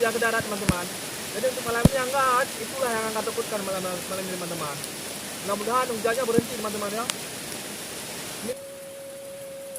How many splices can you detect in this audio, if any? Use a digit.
1